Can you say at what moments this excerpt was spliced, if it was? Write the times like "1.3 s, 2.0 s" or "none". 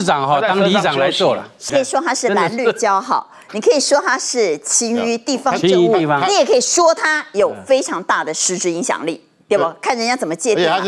1.7 s